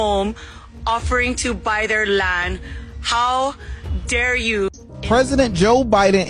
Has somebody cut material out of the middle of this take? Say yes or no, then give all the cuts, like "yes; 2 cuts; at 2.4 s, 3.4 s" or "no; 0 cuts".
yes; 1 cut; at 4.8 s